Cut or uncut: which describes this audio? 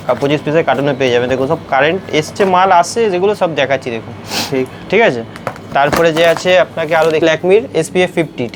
cut